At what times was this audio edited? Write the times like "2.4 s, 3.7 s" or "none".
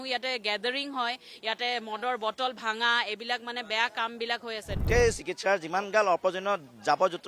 4.8 s